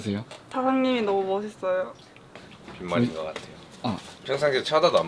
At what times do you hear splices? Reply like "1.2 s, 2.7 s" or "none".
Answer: 4.1 s